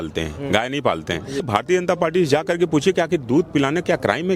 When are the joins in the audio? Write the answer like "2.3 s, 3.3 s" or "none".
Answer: 1.5 s